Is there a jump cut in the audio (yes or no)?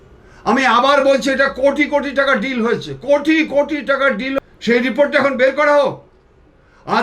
yes